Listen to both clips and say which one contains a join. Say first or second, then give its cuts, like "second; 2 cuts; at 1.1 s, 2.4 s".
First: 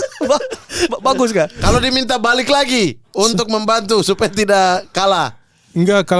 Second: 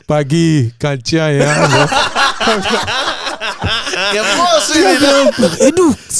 first; 1 cut; at 1.6 s